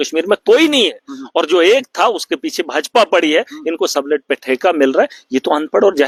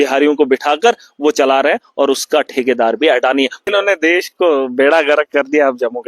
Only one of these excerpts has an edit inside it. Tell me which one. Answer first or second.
second